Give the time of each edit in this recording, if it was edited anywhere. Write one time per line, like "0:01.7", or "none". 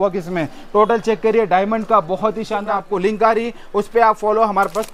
0:02.6